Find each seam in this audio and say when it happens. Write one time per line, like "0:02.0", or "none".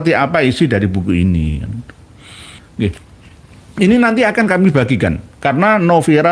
0:02.6